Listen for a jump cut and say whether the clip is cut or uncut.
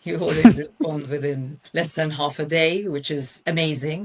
cut